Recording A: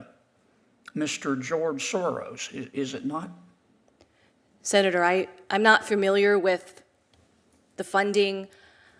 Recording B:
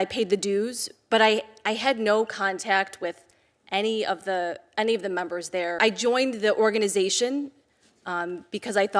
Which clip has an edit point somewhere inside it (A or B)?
B